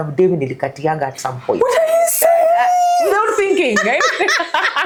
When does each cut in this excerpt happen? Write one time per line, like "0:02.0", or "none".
none